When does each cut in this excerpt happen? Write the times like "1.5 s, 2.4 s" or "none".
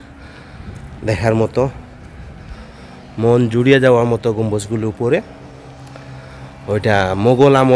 none